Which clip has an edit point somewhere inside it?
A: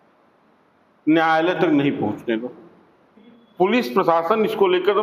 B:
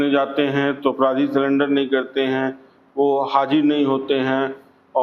A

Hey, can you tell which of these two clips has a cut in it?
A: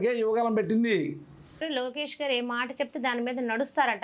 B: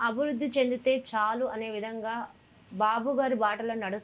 A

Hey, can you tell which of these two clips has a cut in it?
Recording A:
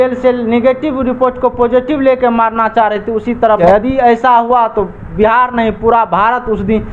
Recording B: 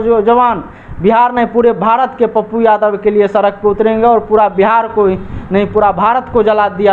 A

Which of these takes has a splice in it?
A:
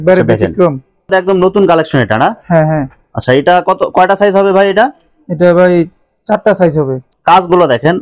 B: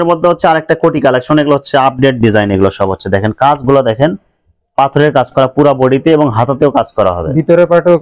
A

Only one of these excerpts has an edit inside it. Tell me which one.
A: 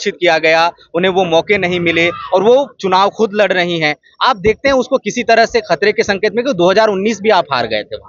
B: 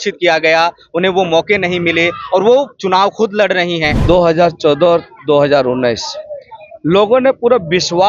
B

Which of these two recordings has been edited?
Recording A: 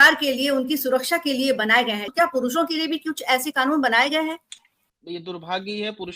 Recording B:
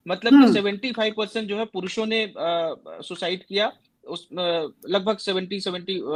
A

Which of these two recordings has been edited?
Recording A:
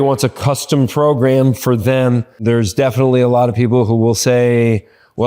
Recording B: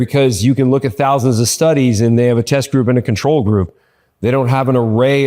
A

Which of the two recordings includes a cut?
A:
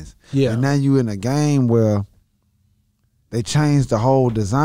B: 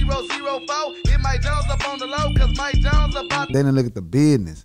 B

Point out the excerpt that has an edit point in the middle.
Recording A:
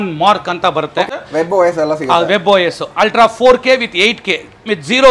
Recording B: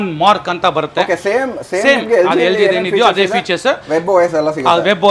A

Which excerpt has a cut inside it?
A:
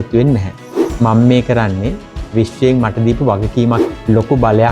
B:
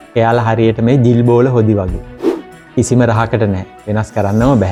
A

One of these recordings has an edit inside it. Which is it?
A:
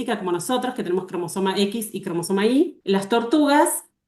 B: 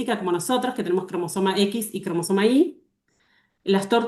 A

